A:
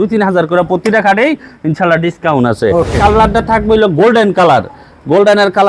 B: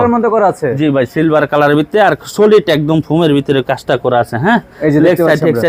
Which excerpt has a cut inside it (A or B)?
A